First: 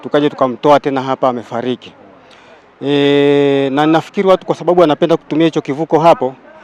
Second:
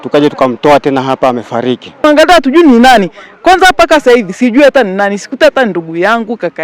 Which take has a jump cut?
second; 1 cut; at 2.0 s

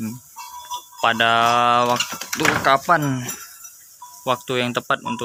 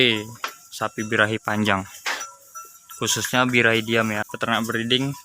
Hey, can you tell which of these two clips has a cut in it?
second; 1 cut; at 4.3 s

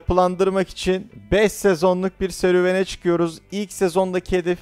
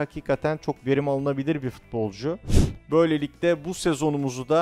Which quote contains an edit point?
second; 1 cut; at 2.5 s

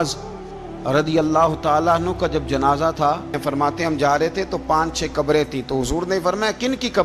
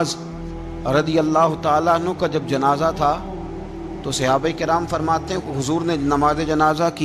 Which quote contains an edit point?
first; 1 cut; at 3.4 s

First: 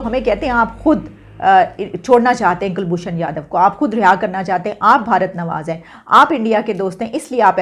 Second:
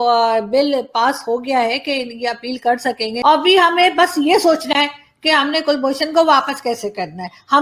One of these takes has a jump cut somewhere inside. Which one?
second; 1 cut; at 3.1 s

